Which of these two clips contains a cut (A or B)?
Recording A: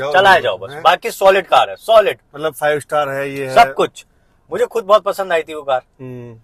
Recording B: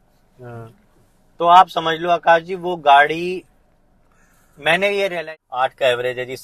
B